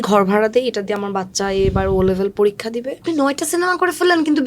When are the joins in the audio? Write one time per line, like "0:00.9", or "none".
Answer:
0:03.0